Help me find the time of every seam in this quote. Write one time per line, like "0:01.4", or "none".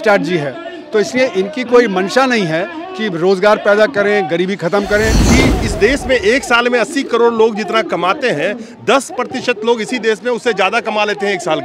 0:05.2